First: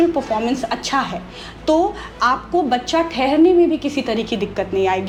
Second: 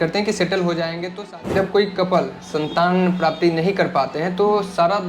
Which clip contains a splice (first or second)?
second